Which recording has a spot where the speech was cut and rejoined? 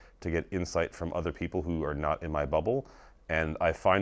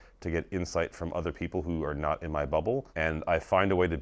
second; 1 cut; at 2.9 s

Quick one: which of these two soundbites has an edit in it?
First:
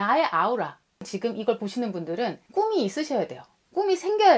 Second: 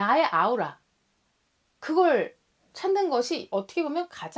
first; 2 cuts; at 1.1 s, 2.4 s

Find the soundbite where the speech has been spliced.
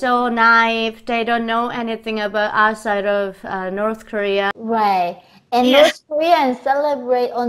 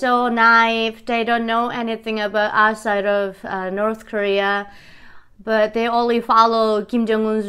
first; 1 cut; at 4.5 s

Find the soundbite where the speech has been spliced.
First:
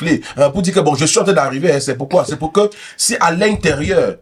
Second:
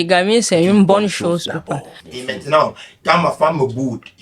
second; 1 cut; at 2.1 s

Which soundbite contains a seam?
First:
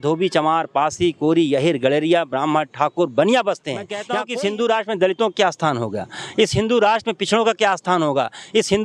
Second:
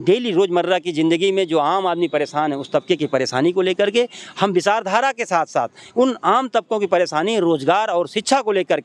first; 1 cut; at 4.2 s

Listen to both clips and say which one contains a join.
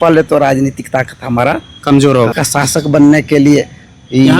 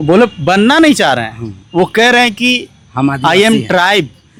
first; 1 cut; at 2.3 s

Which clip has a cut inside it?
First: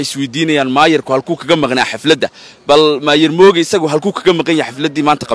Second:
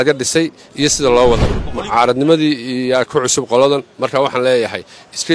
second; 1 cut; at 1.6 s

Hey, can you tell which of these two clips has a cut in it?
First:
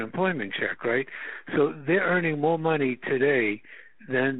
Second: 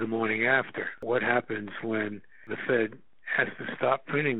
second; 2 cuts; at 1.0 s, 2.5 s

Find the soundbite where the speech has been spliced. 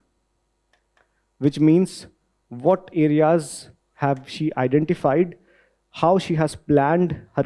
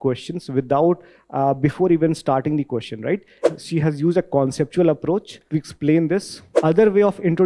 second; 3 cuts; at 3.4 s, 5.4 s, 6.4 s

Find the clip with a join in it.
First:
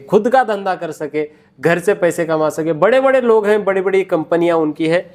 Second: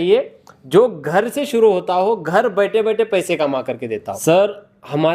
second; 1 cut; at 4.1 s

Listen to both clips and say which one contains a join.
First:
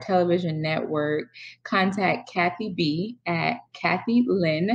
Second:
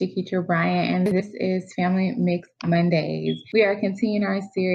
second; 1 cut; at 3.4 s

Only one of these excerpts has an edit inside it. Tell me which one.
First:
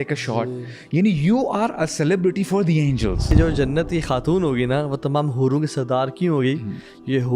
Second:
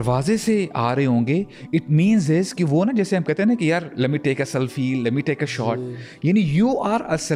first; 1 cut; at 3.3 s

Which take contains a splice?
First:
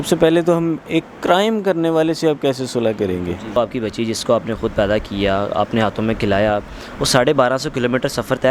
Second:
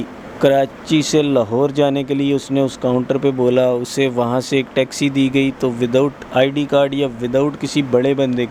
first; 1 cut; at 3.6 s

